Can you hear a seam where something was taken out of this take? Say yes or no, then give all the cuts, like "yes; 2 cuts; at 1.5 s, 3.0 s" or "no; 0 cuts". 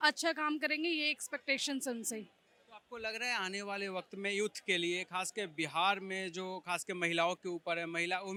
no; 0 cuts